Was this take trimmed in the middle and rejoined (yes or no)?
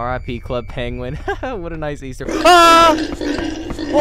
no